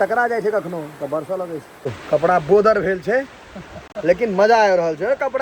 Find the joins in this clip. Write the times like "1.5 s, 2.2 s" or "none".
1.7 s